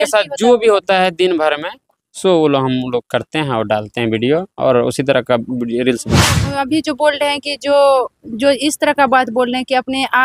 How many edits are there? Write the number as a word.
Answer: one